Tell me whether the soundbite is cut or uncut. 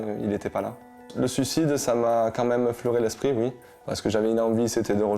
cut